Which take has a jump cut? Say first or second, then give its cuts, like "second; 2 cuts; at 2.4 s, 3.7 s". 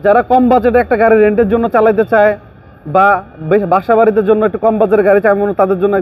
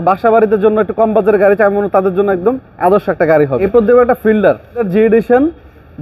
second; 2 cuts; at 3.6 s, 4.9 s